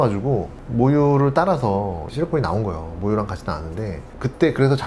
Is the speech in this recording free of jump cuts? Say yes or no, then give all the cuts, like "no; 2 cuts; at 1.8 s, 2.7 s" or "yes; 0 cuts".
no; 1 cut; at 2.1 s